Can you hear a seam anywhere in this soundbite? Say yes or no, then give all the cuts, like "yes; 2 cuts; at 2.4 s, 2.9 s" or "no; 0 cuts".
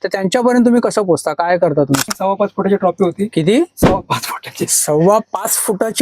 yes; 1 cut; at 2.1 s